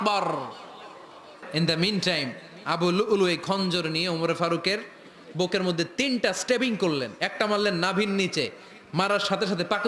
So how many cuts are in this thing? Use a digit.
1